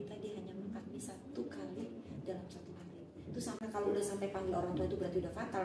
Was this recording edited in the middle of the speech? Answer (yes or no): yes